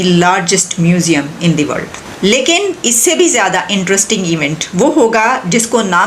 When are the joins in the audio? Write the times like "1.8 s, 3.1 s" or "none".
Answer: 2.0 s